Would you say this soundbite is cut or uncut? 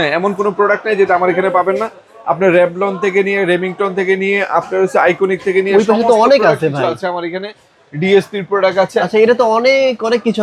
uncut